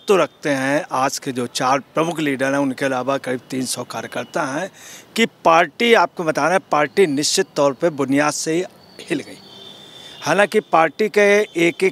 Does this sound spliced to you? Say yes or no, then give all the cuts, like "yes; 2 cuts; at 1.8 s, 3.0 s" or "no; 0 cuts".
no; 0 cuts